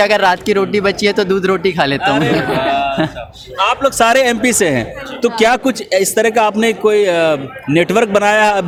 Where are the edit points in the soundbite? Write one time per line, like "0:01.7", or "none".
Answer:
none